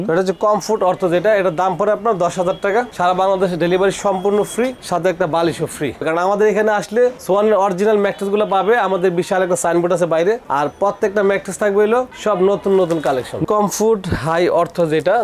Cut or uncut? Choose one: cut